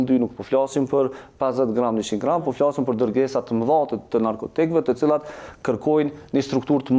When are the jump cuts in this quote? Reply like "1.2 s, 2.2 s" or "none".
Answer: none